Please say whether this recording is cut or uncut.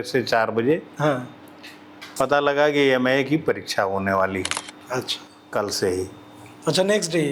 uncut